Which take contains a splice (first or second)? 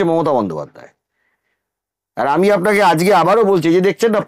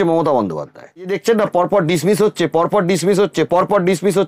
second